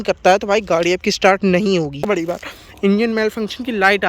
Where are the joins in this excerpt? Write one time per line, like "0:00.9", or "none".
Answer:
0:02.1